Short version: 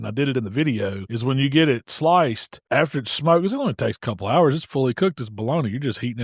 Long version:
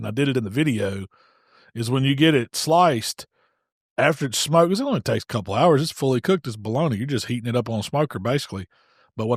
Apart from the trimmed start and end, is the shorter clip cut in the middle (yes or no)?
yes